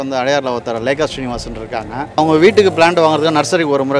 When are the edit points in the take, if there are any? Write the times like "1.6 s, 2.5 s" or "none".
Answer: 2.2 s

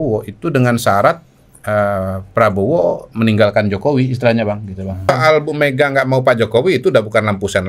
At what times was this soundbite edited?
5.1 s

